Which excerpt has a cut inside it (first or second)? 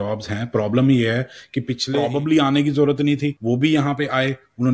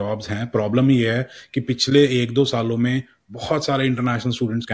first